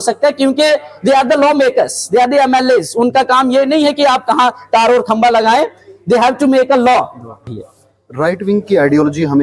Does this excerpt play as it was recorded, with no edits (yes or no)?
no